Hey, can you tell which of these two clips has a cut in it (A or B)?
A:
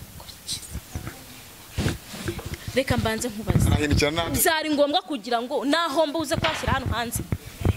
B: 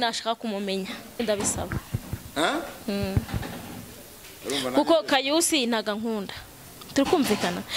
B